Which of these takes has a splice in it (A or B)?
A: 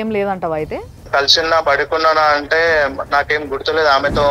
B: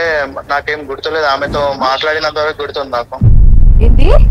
A